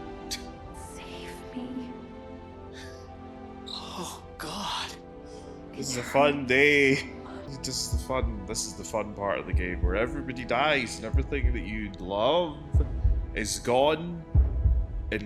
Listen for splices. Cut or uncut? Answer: cut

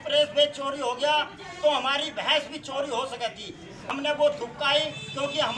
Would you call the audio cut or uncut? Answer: cut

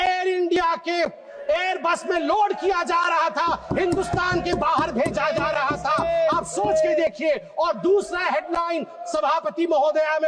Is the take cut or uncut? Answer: uncut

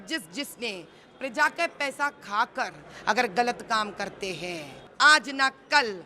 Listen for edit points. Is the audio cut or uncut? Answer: cut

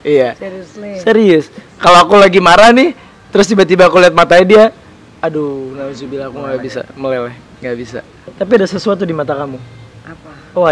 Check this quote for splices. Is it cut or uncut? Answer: cut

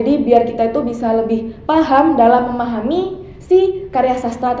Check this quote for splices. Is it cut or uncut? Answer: uncut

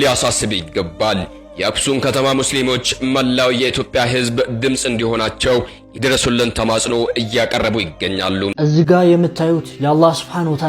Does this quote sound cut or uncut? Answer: cut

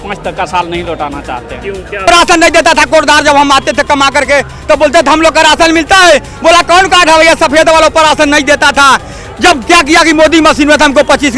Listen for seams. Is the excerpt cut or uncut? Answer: cut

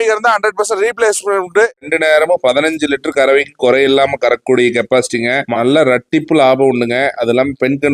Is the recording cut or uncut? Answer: cut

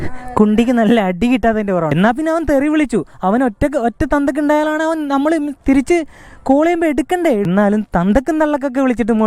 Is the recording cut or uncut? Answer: cut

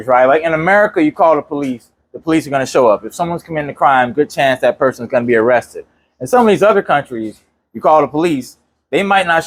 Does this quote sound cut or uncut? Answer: uncut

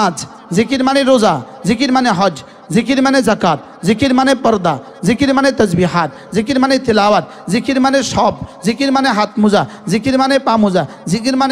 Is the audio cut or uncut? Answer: uncut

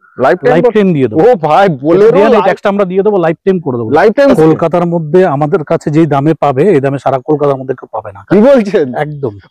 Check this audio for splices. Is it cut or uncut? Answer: cut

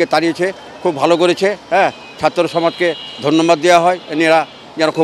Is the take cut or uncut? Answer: uncut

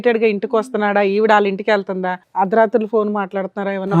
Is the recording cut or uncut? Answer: cut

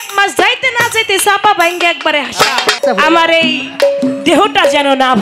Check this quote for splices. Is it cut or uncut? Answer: cut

